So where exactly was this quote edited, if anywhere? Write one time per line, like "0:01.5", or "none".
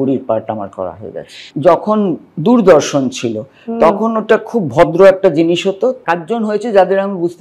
0:01.5
0:06.0